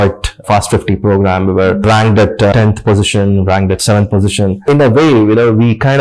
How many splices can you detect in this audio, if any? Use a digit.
2